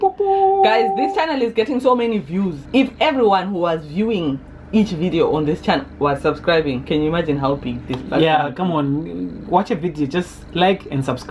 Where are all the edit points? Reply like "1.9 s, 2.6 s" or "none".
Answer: 2.6 s